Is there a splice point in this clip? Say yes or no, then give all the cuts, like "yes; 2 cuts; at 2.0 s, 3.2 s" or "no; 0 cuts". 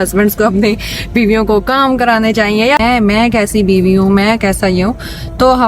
yes; 1 cut; at 2.8 s